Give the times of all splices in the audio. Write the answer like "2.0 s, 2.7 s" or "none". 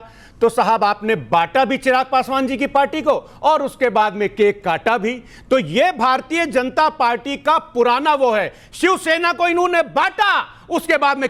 none